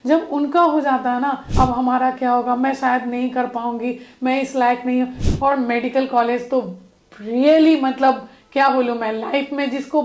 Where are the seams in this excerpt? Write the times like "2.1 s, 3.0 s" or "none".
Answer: 1.4 s, 5.2 s